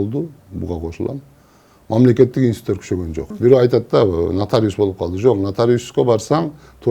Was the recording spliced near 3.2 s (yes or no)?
yes